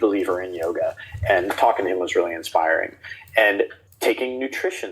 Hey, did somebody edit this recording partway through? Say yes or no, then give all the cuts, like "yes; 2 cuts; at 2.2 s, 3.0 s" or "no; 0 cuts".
yes; 1 cut; at 3.8 s